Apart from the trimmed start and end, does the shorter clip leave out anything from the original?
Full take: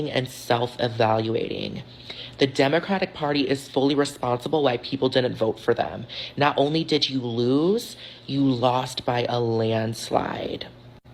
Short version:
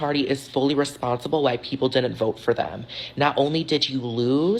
no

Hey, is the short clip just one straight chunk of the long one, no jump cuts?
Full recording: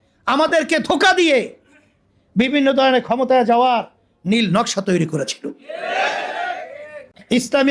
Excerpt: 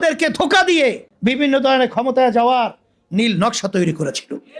no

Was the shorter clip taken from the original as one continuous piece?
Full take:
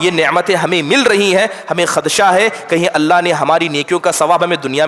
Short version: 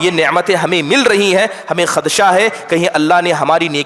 yes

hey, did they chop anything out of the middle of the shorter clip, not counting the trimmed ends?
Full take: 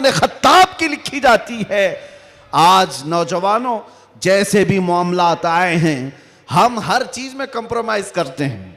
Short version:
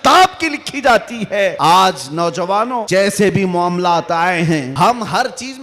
yes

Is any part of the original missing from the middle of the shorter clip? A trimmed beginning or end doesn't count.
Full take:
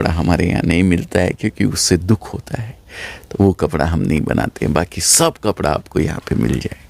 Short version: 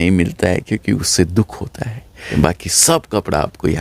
yes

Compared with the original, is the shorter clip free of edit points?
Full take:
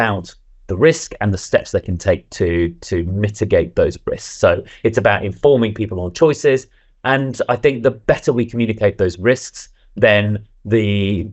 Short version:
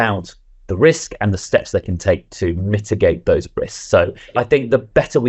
no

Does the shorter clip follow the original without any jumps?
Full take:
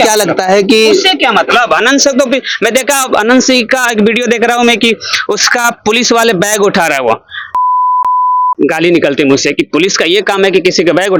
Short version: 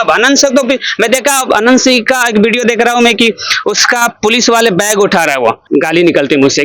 no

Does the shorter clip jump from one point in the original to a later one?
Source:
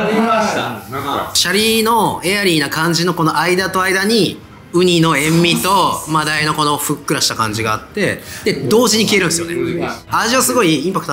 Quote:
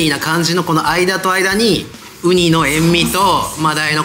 no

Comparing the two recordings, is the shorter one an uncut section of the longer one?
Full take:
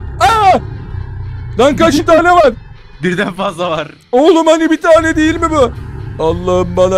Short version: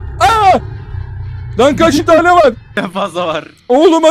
no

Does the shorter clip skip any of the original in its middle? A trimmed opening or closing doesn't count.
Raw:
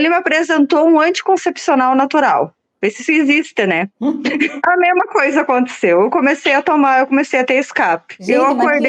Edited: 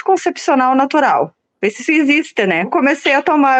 yes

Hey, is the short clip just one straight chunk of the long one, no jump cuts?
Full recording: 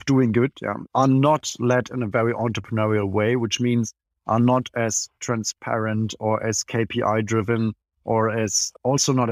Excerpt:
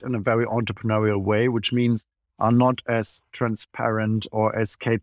yes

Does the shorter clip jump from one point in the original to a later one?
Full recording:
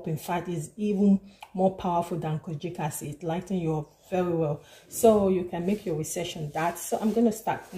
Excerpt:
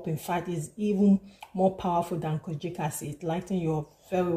no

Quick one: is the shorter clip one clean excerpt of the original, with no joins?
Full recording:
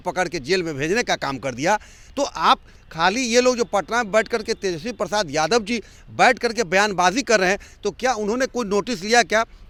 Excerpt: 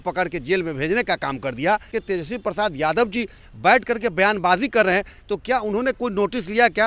no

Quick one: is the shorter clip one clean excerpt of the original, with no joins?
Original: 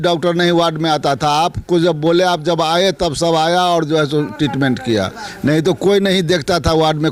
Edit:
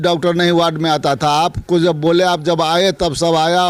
yes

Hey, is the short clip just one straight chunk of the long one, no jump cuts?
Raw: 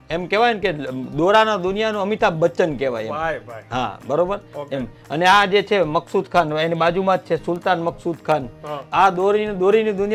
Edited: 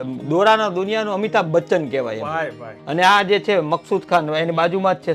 no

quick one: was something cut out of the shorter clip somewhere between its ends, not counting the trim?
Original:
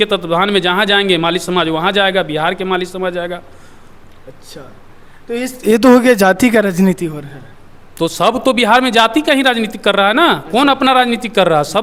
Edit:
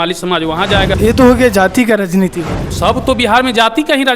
yes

